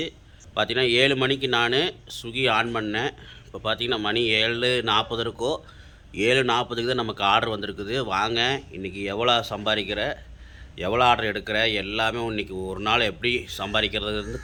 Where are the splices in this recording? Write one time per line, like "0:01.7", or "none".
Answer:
none